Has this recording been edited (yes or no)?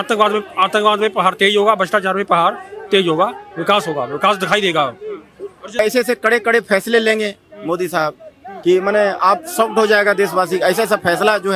yes